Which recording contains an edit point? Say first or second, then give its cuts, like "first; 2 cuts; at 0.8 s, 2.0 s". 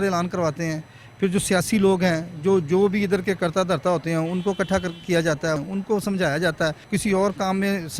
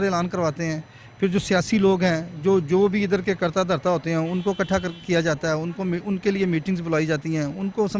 first; 2 cuts; at 5.6 s, 6.9 s